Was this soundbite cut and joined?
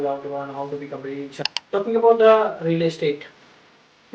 yes; 1 cut; at 1.4 s

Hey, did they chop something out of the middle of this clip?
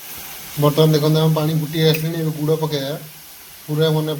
no; 0 cuts

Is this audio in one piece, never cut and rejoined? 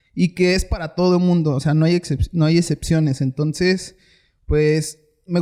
yes; 0 cuts

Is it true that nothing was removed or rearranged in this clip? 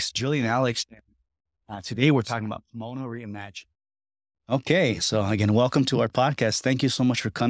yes; 0 cuts

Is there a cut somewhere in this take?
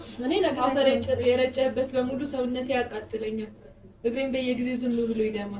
no; 0 cuts

